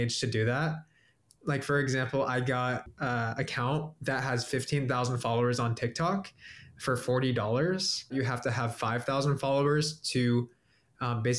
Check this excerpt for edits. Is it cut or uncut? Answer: cut